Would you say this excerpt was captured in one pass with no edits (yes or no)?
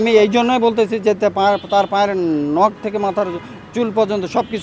yes